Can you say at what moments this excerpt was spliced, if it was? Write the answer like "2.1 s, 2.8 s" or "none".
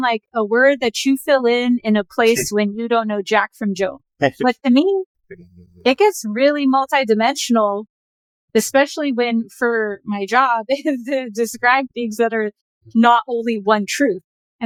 none